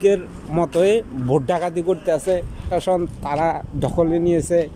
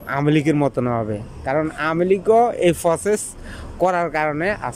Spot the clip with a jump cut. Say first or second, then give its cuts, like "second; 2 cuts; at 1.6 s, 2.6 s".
first; 1 cut; at 2.6 s